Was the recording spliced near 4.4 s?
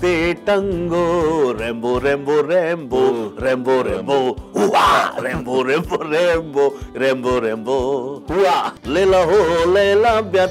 no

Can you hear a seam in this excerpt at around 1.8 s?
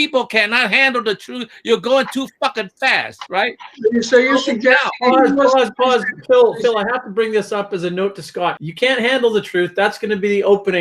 no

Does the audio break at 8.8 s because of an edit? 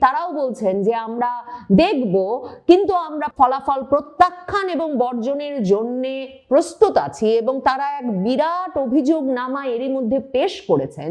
no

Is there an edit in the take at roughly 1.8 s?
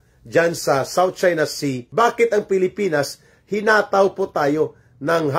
yes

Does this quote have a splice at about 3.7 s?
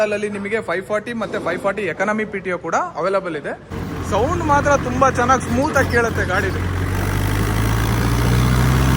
yes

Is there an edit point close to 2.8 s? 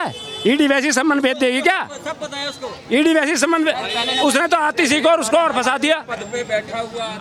no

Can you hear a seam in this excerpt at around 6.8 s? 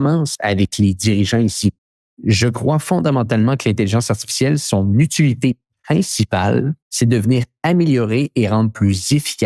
yes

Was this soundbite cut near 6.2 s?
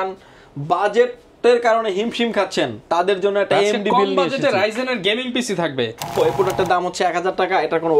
yes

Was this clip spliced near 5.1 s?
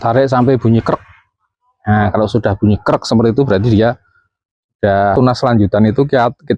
yes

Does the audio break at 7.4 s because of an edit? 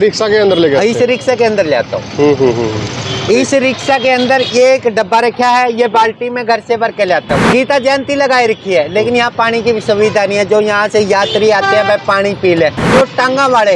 yes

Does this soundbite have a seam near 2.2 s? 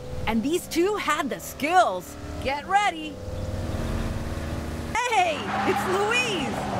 no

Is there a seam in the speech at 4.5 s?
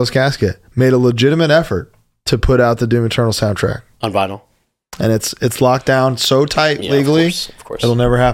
no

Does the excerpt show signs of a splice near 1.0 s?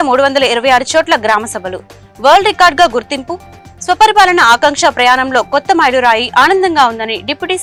no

